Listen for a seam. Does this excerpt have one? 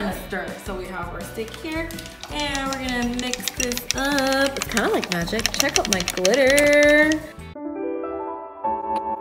yes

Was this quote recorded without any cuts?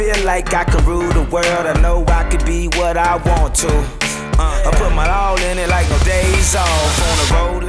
yes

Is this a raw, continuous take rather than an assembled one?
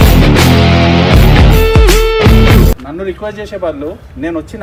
yes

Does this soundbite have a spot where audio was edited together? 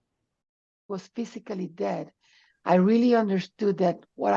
yes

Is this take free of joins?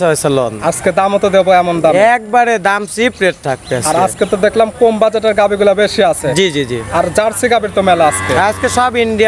yes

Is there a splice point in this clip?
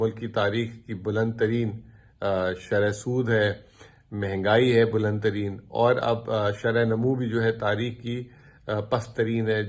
no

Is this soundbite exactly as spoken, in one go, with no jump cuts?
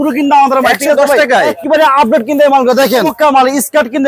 no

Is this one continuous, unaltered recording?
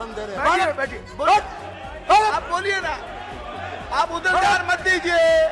yes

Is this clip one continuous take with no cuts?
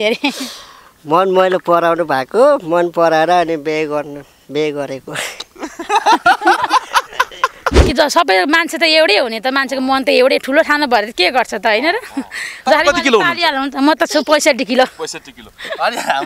no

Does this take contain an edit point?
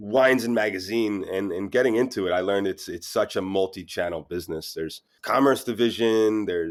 no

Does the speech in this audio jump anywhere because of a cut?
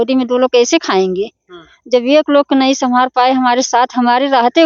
no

